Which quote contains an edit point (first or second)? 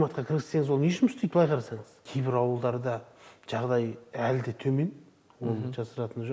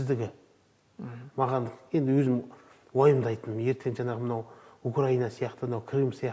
first